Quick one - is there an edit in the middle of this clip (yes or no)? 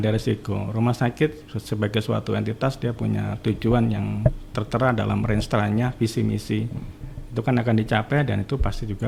no